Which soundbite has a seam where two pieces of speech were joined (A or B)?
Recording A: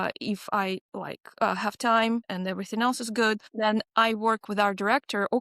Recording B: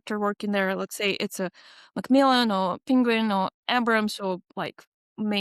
A